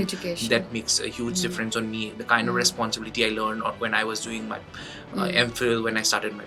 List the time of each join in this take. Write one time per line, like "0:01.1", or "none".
none